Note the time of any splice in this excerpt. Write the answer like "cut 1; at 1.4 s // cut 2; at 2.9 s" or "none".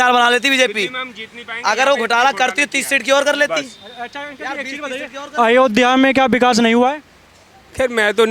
none